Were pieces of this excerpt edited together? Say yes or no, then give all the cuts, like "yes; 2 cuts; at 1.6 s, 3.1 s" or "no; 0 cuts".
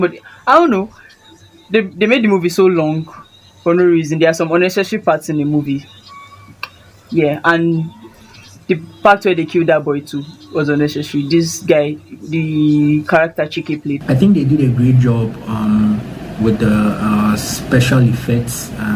yes; 1 cut; at 14.0 s